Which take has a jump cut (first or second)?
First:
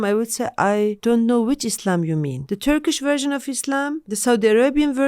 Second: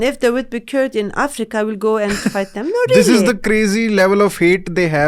first